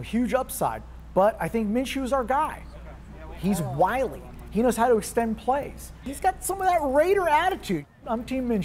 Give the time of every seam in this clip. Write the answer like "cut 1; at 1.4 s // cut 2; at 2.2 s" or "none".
cut 1; at 6.0 s // cut 2; at 7.9 s